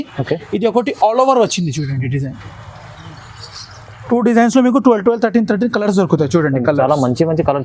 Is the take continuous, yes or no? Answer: yes